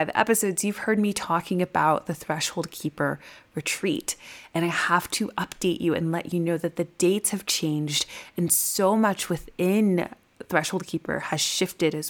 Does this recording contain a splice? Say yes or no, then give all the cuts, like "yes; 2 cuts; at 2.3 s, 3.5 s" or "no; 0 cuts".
no; 0 cuts